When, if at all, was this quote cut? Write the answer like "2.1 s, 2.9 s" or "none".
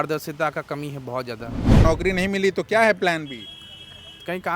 1.8 s